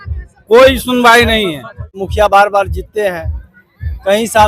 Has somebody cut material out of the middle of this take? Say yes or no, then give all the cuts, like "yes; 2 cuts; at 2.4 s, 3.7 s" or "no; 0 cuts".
yes; 1 cut; at 2.0 s